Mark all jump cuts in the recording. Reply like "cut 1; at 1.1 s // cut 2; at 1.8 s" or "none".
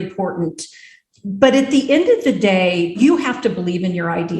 cut 1; at 2.9 s